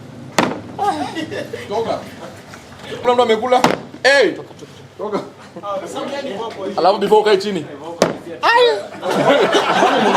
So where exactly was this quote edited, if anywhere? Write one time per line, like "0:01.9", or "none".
0:03.0